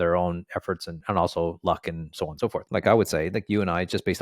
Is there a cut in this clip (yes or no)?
yes